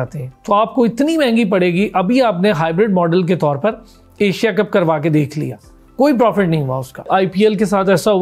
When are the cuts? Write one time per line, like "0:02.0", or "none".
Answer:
0:07.1